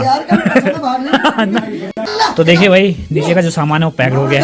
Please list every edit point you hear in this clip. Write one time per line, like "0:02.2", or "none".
0:02.1